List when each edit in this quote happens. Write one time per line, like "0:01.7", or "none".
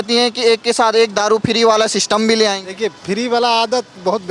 none